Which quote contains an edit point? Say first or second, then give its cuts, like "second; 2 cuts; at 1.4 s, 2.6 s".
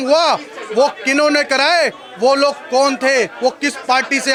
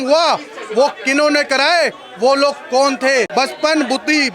second; 1 cut; at 3.3 s